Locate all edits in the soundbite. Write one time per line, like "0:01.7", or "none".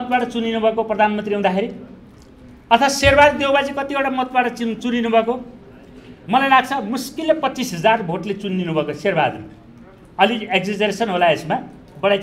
none

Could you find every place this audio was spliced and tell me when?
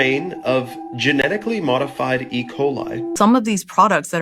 0:03.1

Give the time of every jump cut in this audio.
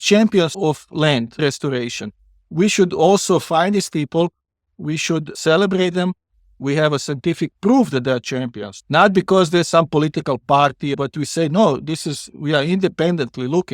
0:01.4
0:06.6
0:10.9

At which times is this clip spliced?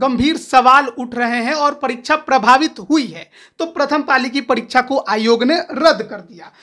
none

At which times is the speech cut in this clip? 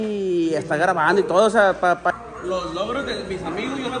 0:02.1

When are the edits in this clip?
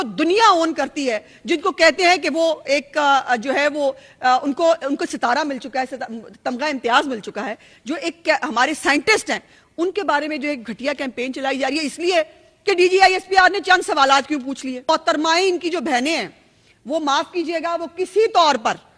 0:14.8

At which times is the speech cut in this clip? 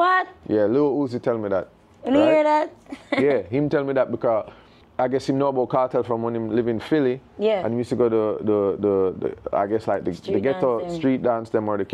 none

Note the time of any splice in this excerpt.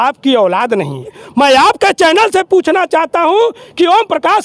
0:01.2

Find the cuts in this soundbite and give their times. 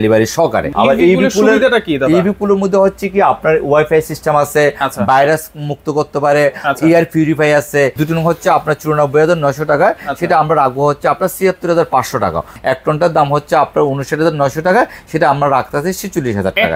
0:00.7
0:08.0
0:12.5

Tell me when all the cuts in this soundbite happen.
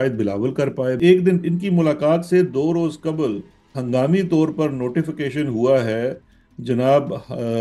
0:01.0

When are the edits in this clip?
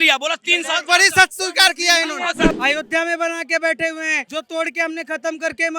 0:02.6
0:04.2

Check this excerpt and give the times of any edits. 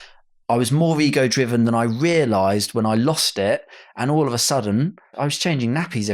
0:05.1

